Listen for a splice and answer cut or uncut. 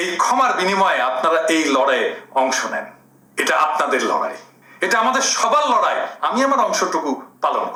uncut